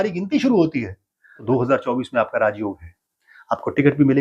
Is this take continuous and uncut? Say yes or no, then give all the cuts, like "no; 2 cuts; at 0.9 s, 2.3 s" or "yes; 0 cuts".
no; 1 cut; at 1.4 s